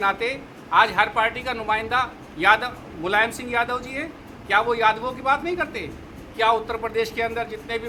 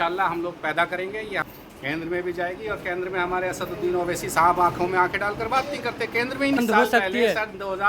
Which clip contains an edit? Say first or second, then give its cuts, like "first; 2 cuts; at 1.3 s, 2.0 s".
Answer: second; 2 cuts; at 1.4 s, 6.6 s